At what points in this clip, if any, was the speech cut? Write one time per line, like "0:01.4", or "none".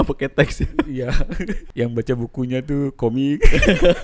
0:01.6

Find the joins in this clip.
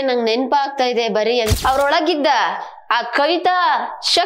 0:01.5

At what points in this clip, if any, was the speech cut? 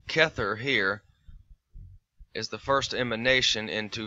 0:02.4

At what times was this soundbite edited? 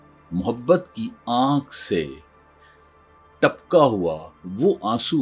none

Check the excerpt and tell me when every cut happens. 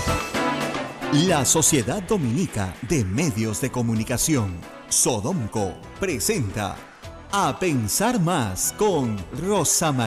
0:00.9

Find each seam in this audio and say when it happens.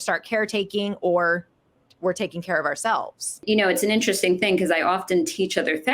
0:03.4

